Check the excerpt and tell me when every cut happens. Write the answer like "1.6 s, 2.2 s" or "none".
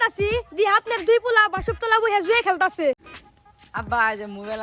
3.1 s

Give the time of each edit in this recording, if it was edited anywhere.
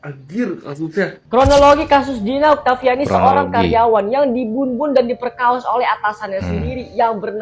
1.2 s

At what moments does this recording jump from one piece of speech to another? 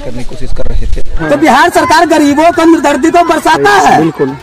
1.2 s

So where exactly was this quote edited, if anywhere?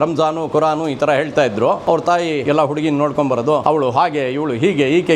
2.3 s, 3.6 s

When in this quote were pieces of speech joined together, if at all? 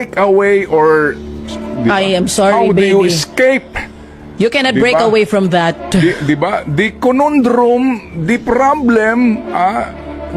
none

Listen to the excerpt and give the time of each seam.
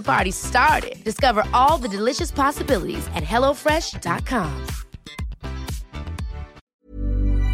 6.6 s

